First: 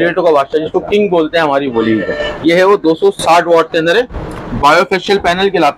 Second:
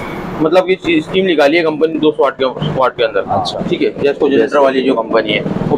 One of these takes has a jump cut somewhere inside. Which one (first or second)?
second